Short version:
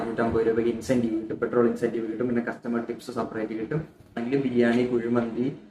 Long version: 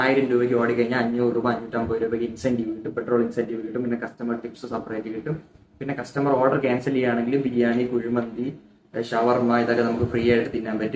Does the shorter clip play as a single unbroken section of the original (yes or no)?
no